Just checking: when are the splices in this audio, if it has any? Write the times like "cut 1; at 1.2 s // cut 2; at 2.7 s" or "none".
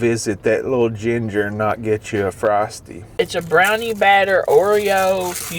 cut 1; at 2.9 s